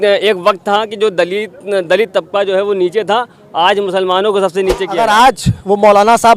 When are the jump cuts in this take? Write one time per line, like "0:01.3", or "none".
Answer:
0:04.8